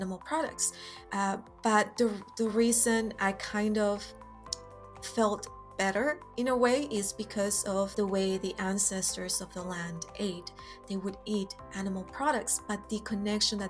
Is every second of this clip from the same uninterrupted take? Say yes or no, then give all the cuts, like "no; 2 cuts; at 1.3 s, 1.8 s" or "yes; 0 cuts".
no; 1 cut; at 7.9 s